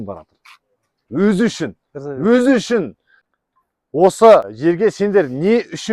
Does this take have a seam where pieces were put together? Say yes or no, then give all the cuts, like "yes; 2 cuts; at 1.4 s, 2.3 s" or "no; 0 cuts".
yes; 2 cuts; at 3.2 s, 4.5 s